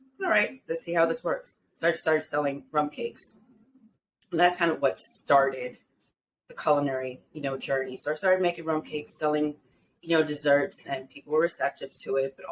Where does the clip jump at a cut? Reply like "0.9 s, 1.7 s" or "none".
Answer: none